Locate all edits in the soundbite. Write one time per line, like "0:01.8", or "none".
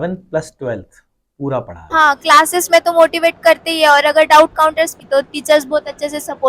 0:01.8
0:05.0

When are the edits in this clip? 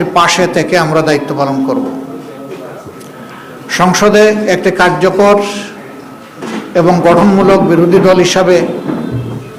none

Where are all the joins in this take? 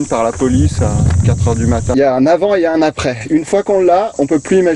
0:01.9

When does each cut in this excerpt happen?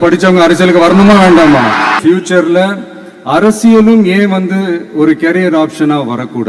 0:02.0

